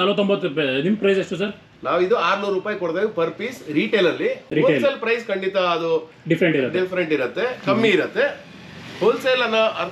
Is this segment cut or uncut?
uncut